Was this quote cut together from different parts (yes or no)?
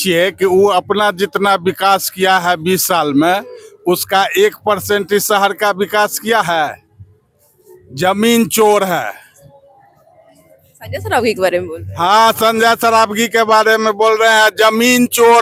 no